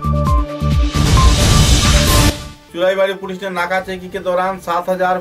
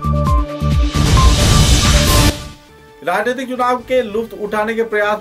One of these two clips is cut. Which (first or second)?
second